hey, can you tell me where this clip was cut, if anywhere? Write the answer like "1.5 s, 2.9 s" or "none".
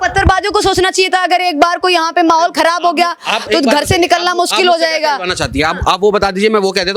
none